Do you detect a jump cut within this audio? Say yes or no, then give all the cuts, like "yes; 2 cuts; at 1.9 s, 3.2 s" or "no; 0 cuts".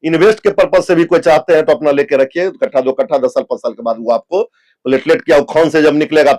no; 0 cuts